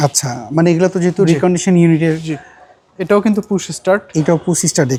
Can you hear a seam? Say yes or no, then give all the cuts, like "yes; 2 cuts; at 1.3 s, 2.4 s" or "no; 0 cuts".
no; 0 cuts